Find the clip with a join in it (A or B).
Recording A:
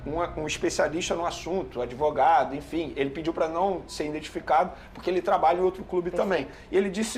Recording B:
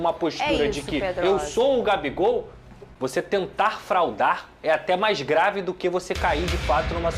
B